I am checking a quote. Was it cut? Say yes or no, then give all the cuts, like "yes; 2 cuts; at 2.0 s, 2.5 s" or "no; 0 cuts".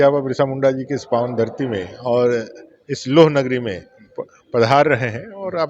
no; 0 cuts